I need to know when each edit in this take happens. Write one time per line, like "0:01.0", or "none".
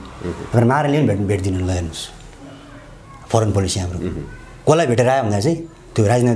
none